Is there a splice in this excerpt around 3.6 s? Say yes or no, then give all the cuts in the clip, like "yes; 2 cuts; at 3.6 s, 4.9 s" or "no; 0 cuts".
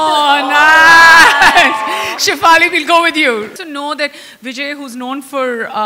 yes; 1 cut; at 3.6 s